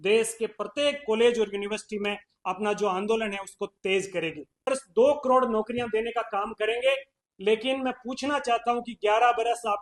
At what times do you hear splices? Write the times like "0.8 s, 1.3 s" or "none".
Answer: 4.7 s